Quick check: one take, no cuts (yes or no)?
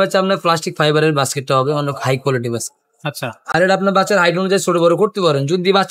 yes